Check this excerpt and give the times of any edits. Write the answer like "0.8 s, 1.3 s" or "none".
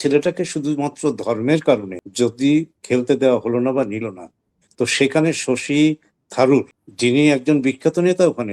2.0 s, 6.8 s